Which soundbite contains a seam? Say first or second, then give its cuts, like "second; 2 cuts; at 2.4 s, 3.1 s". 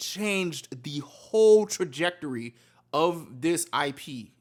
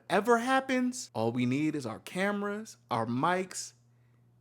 second; 1 cut; at 1.0 s